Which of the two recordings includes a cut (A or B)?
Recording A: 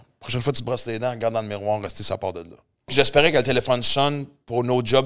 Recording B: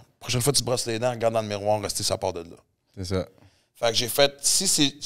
A